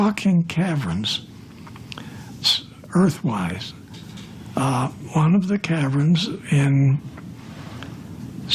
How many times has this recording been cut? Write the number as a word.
zero